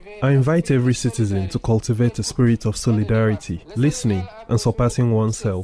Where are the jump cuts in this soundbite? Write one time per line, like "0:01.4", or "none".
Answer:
0:03.6